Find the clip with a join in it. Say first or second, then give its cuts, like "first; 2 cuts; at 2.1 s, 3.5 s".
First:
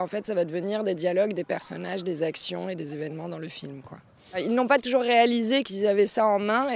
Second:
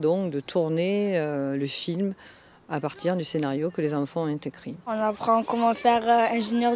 second; 1 cut; at 2.6 s